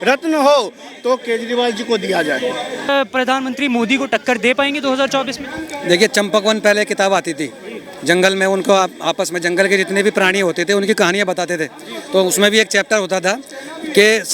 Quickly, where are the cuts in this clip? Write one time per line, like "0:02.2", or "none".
0:02.9